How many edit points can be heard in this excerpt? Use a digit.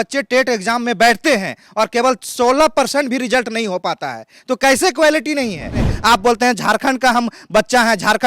1